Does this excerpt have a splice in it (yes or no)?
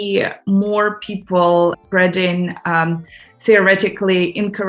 yes